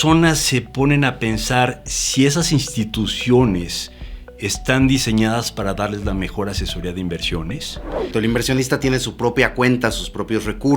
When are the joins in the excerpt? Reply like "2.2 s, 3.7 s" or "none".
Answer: 8.1 s